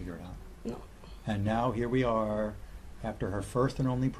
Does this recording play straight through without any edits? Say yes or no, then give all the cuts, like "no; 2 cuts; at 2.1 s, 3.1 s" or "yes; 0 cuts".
yes; 0 cuts